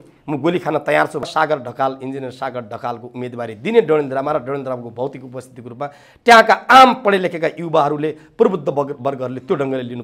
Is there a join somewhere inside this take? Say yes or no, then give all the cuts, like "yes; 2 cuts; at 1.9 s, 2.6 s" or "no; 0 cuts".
yes; 1 cut; at 1.3 s